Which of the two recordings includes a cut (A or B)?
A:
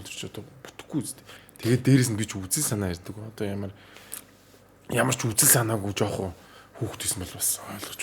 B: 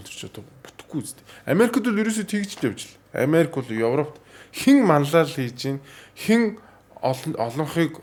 A